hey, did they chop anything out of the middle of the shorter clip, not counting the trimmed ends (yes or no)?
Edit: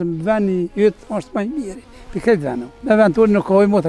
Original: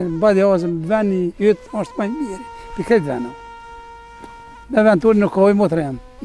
yes